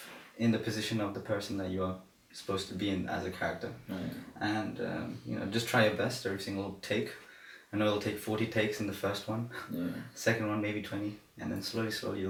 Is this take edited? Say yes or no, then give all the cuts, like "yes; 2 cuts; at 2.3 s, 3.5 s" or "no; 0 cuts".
no; 0 cuts